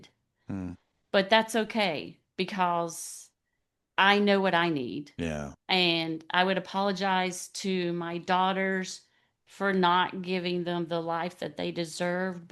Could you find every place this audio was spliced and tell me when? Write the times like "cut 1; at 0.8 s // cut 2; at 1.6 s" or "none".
none